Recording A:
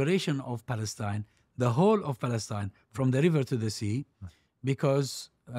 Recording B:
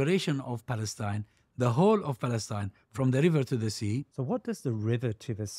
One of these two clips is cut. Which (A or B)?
B